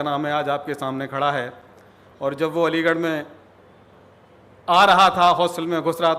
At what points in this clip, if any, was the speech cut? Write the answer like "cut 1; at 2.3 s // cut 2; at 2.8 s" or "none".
none